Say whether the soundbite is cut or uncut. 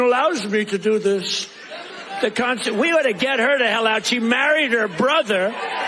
uncut